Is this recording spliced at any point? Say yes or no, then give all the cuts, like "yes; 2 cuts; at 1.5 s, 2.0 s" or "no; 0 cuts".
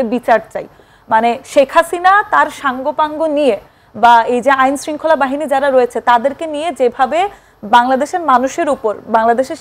no; 0 cuts